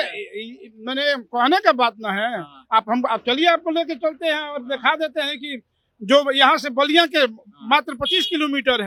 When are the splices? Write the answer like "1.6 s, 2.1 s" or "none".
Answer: none